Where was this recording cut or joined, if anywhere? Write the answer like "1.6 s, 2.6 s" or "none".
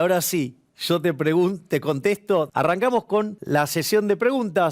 2.5 s, 3.4 s